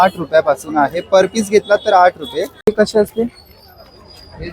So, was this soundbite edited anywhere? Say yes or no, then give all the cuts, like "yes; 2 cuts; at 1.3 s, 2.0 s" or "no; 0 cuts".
yes; 1 cut; at 2.5 s